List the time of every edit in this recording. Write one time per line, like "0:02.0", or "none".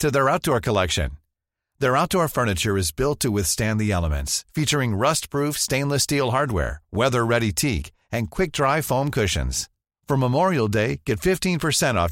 none